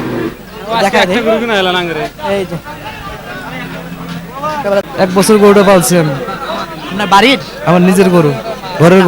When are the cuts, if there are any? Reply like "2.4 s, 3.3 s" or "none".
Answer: 4.8 s

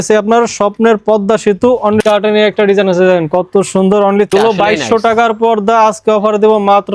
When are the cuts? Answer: 2.0 s, 4.3 s

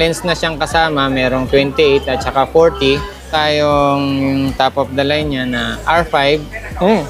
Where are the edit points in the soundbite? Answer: 3.3 s

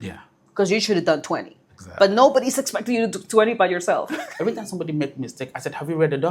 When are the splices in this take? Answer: 4.2 s

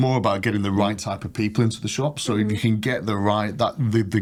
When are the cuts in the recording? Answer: none

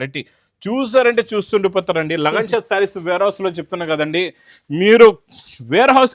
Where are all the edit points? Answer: none

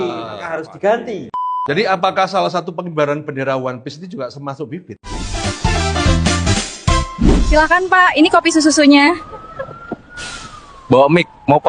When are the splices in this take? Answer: 1.4 s, 5.2 s

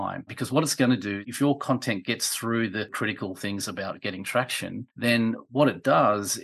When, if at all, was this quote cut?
2.9 s

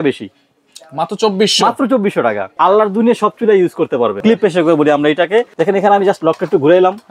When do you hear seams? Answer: 2.5 s, 4.2 s, 5.5 s

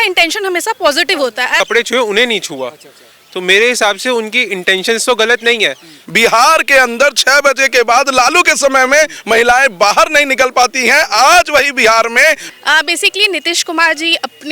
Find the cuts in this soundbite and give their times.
1.6 s, 5.9 s, 12.5 s

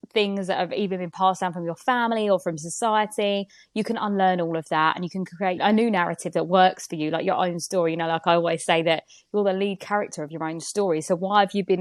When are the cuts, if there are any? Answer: none

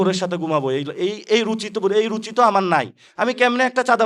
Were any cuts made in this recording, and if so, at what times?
none

